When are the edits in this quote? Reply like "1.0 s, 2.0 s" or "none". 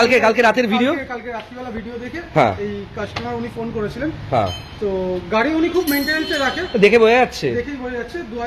none